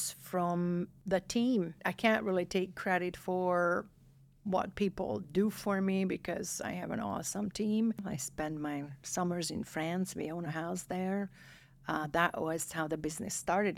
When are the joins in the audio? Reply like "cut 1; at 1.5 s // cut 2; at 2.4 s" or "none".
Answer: cut 1; at 0.9 s // cut 2; at 1.8 s // cut 3; at 8.0 s